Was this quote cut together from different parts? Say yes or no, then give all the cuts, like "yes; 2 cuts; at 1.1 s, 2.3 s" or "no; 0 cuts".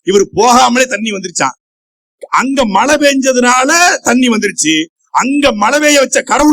no; 0 cuts